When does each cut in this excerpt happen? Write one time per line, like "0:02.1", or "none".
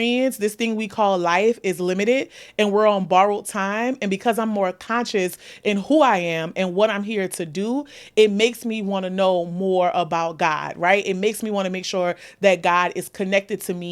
none